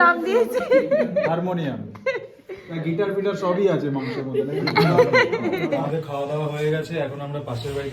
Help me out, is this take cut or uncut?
uncut